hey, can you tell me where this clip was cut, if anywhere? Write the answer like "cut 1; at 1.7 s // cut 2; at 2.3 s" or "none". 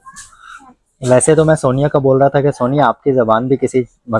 none